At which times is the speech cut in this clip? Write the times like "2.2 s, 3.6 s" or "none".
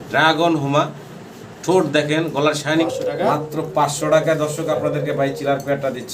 2.8 s